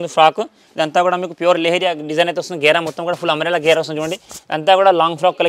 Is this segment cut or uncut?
uncut